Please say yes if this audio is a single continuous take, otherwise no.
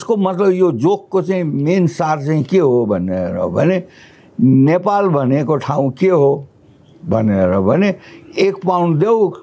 yes